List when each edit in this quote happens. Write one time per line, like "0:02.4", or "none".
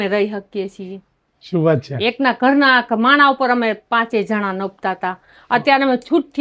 none